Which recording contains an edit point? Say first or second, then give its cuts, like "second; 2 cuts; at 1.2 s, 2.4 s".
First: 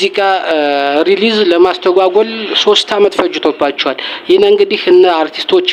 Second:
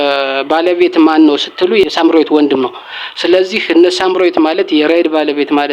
second; 1 cut; at 1.9 s